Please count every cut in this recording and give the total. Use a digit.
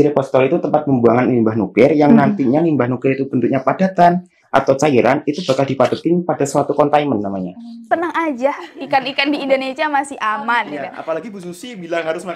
1